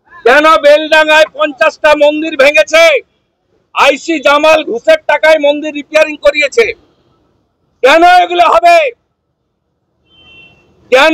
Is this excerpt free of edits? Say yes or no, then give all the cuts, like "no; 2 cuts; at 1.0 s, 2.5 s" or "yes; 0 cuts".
yes; 0 cuts